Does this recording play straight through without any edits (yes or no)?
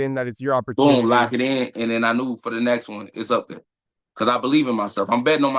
yes